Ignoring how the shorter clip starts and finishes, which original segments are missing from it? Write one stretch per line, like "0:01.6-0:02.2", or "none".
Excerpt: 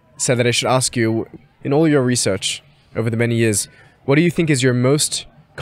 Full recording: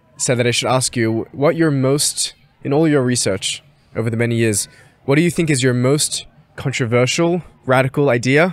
0:01.3-0:02.3